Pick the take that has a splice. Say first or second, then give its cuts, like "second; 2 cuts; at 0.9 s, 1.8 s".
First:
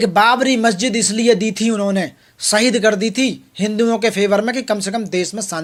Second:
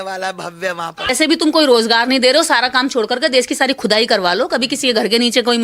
second; 1 cut; at 1.1 s